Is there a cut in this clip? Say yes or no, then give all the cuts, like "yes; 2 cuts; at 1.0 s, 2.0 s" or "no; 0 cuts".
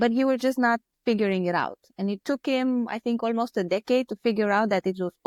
no; 0 cuts